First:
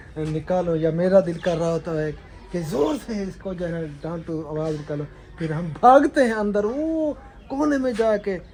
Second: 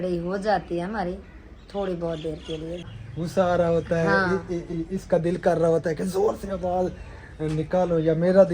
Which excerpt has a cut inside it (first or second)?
second